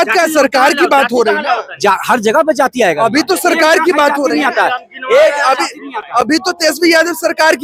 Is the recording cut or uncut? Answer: uncut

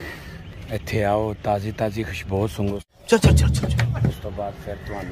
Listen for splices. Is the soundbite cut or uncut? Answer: cut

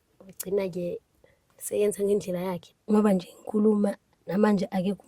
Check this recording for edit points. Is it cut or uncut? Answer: cut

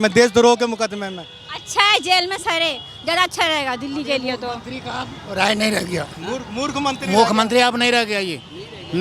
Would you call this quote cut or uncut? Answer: uncut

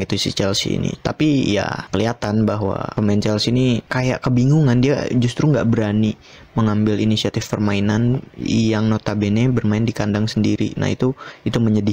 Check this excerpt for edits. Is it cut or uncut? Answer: cut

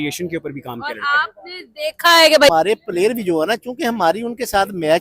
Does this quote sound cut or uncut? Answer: cut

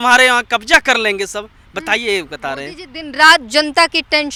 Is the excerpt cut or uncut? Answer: uncut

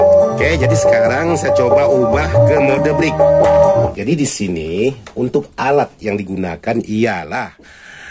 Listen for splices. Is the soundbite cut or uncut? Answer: cut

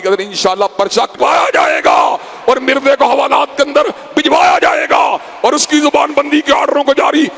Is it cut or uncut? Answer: cut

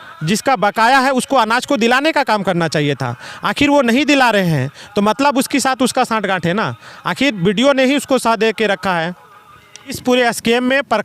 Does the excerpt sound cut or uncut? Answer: cut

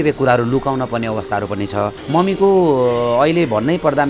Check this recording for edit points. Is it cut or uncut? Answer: cut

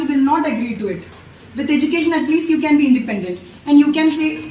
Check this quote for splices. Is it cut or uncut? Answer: uncut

